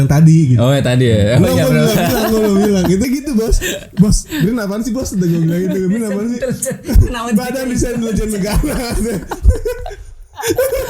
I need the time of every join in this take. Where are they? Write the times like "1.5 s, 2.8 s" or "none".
3.0 s